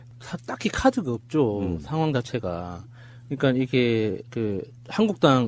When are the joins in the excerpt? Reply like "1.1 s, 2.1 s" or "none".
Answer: 4.3 s

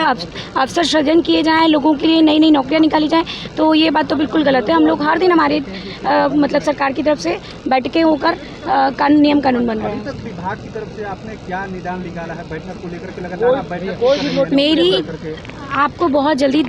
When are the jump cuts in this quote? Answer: none

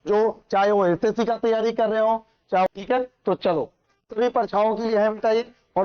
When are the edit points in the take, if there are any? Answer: 2.7 s

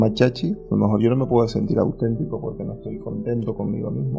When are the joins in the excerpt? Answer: none

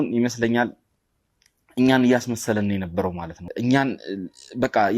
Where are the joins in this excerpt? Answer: 3.4 s

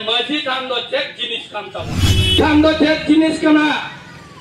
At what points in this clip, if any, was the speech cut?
2.2 s

